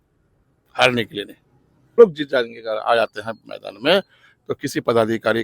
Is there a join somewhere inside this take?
yes; 1 cut; at 2.0 s

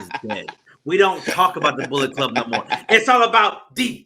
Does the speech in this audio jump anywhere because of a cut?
no; 0 cuts

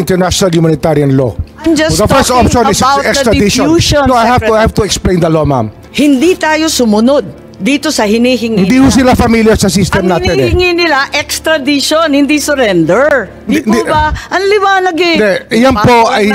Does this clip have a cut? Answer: yes; 1 cut; at 5.8 s

